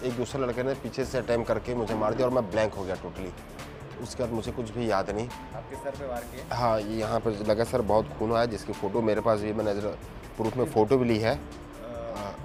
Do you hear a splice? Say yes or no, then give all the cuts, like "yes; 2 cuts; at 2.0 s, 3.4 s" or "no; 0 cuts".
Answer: no; 0 cuts